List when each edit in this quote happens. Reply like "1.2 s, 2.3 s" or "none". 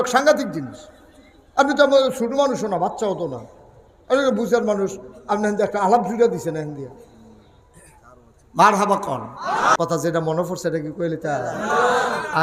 9.8 s